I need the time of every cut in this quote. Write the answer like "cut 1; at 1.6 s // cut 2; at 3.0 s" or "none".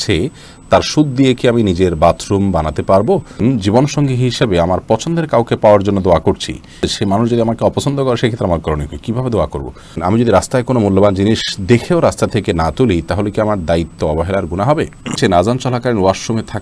cut 1; at 3.4 s // cut 2; at 6.9 s // cut 3; at 10.0 s // cut 4; at 15.2 s